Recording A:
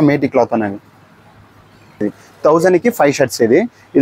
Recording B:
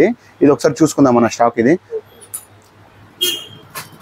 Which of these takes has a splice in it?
A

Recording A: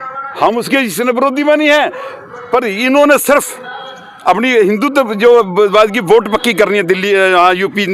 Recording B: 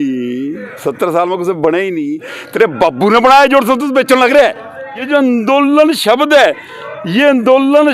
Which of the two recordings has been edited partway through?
B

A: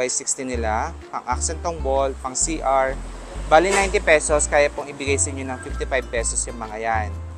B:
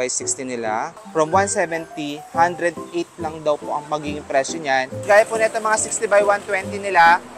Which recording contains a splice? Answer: B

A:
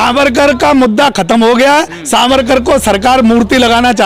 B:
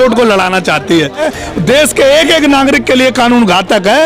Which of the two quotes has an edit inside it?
B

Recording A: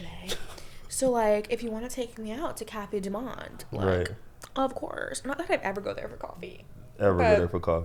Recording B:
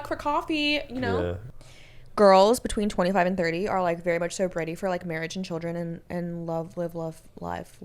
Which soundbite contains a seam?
B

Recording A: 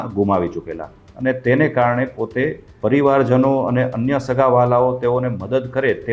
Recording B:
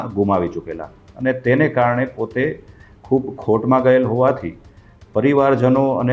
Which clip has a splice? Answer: A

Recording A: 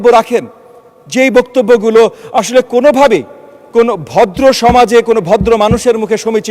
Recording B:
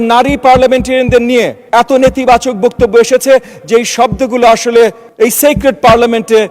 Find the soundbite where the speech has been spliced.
B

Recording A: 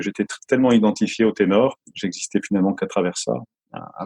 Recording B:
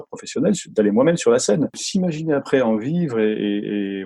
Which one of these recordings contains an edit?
B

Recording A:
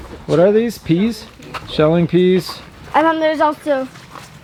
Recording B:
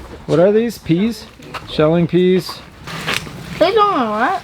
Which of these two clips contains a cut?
B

